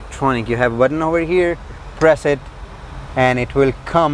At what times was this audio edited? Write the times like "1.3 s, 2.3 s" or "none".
none